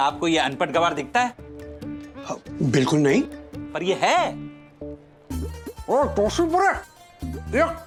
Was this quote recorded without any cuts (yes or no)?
yes